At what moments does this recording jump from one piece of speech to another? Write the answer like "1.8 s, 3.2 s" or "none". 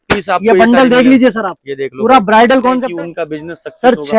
2.8 s